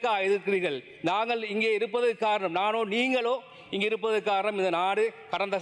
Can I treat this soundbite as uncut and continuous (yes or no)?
yes